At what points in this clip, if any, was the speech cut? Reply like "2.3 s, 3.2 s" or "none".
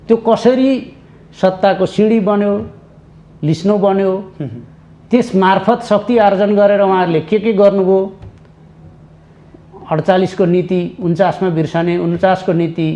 none